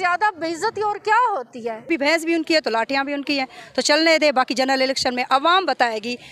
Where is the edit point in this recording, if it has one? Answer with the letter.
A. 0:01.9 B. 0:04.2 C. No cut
A